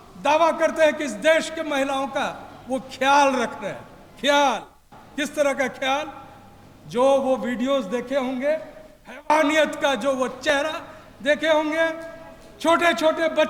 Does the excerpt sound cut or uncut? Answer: uncut